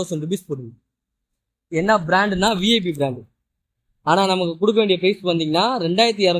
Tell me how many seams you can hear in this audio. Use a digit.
0